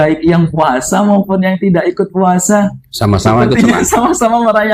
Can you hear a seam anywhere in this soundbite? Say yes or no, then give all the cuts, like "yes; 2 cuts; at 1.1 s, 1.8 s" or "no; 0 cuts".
no; 0 cuts